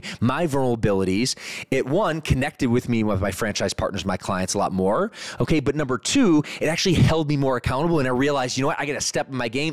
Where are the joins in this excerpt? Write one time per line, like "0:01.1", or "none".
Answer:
none